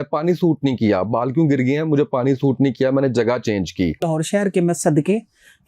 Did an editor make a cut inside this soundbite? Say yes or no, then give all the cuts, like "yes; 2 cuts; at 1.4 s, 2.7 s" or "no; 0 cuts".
yes; 1 cut; at 4.1 s